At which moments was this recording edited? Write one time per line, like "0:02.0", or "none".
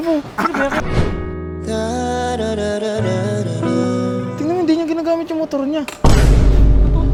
none

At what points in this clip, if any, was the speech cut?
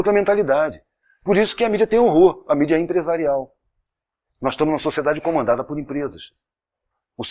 none

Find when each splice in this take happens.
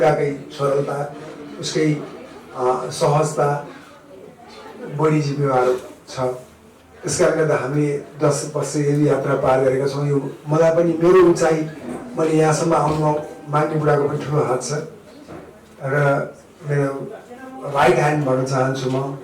none

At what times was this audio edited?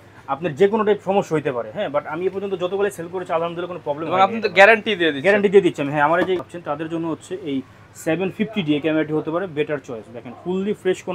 0:06.5

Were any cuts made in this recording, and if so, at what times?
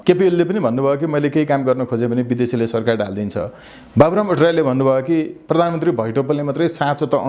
none

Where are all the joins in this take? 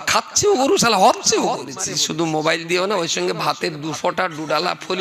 0:01.8

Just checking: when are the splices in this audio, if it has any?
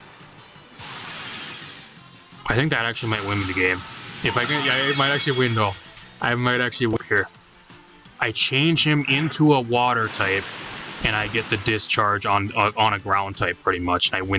0:07.0

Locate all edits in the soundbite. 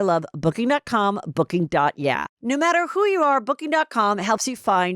0:02.3

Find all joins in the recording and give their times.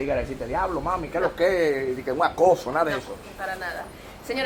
none

